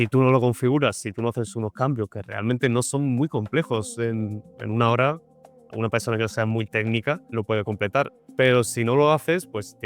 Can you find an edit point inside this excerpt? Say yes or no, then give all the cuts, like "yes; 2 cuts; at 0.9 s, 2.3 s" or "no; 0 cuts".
no; 0 cuts